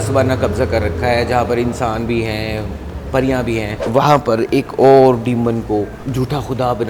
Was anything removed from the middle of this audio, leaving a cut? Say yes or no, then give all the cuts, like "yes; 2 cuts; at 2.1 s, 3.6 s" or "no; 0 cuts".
yes; 2 cuts; at 3.8 s, 6.0 s